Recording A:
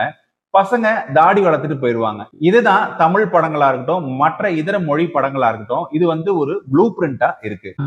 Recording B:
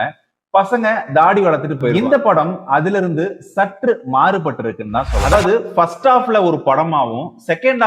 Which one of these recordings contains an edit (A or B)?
B